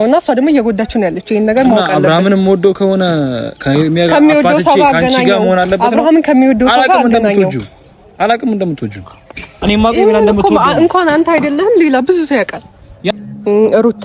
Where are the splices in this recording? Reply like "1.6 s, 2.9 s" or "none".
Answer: 13.0 s